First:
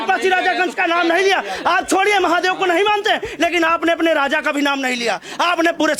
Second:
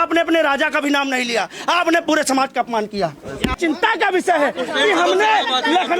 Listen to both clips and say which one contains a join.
second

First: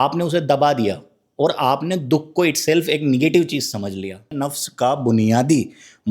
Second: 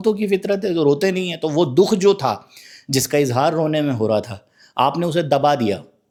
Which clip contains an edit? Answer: first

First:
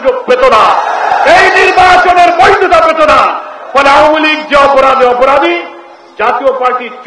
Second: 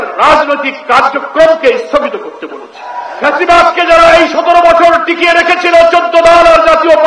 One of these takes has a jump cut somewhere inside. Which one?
second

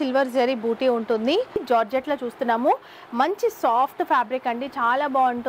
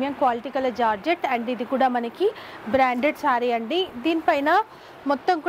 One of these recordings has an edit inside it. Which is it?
first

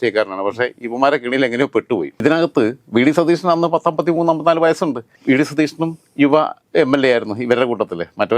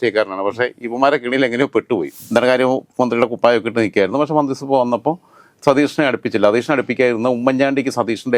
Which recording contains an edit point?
second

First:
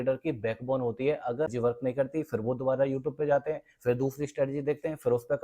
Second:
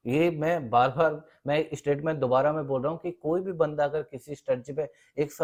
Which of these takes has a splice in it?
first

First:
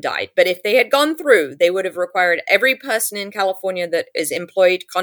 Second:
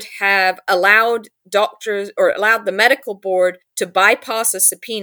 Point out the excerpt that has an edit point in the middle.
second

